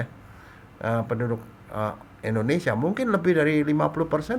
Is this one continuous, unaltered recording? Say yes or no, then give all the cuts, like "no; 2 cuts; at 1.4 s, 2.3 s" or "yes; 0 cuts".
yes; 0 cuts